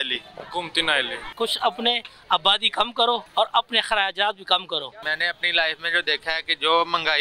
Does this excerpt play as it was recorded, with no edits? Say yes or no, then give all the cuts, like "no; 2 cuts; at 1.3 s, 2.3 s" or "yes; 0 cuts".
no; 3 cuts; at 1.2 s, 3.3 s, 5.0 s